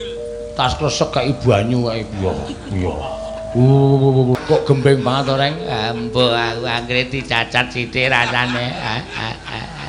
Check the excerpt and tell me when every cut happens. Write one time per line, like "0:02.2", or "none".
0:04.4

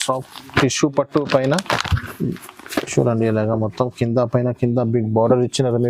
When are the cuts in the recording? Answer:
none

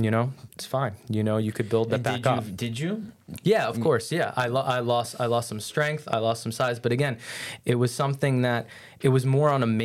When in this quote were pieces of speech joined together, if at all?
none

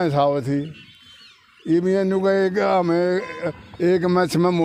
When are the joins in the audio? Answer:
none

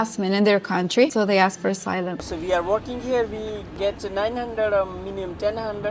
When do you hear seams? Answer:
0:01.1
0:02.2
0:03.7

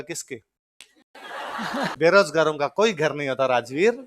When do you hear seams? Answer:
0:01.9

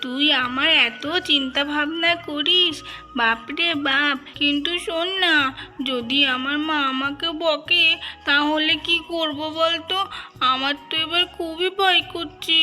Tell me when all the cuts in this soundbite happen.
0:04.3

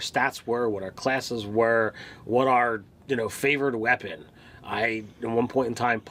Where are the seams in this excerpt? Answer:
none

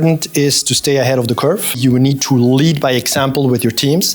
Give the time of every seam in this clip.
0:01.8

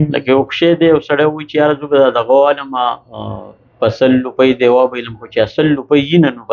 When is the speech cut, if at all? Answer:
none

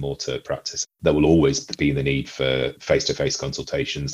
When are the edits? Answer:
0:00.9
0:02.8

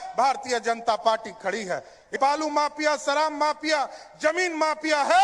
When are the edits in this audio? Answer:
0:02.1

